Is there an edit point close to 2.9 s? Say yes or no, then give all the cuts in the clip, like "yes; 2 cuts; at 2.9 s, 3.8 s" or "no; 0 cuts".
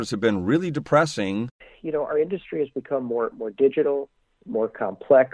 no; 1 cut; at 1.5 s